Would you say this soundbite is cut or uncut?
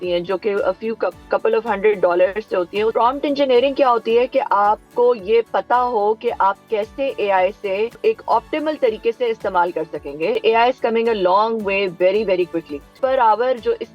cut